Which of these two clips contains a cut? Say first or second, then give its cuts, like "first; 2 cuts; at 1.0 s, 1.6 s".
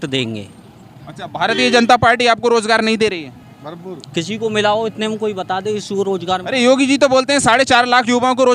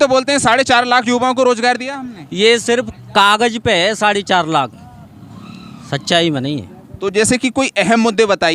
second; 1 cut; at 6.8 s